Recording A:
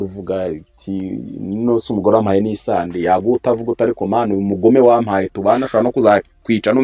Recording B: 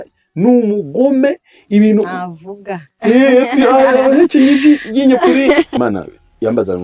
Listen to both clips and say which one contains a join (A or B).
B